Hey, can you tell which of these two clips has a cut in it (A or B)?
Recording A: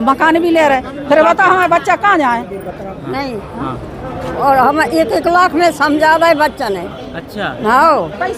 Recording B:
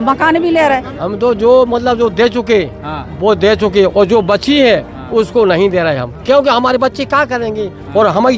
B